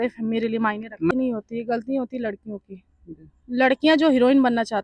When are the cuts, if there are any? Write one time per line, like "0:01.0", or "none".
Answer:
0:01.1